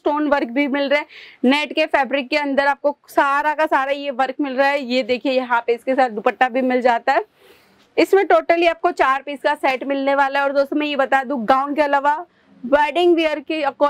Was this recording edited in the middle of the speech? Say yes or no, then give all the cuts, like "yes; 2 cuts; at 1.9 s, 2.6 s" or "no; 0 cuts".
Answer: no; 0 cuts